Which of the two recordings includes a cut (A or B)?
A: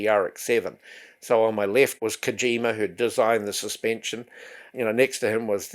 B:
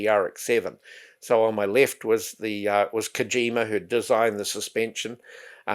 A